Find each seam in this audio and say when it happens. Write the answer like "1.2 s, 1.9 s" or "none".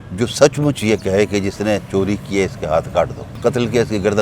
3.3 s